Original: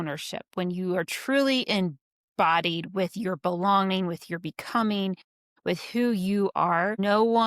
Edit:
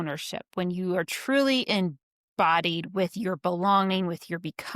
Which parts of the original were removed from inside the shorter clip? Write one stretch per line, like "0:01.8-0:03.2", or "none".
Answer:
none